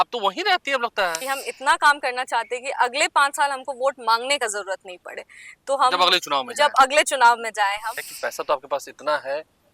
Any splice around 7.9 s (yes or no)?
yes